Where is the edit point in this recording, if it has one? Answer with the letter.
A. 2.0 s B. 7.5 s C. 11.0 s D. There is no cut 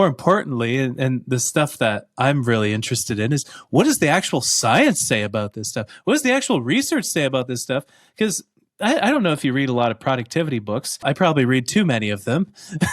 C